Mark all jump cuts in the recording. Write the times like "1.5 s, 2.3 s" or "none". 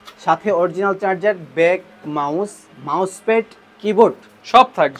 none